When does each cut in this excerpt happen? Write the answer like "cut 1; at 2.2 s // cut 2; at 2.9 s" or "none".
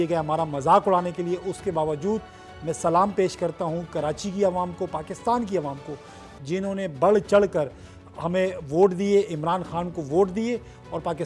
none